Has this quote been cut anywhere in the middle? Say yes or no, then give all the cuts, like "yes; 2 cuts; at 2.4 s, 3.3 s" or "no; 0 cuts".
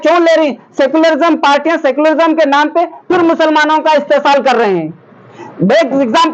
no; 0 cuts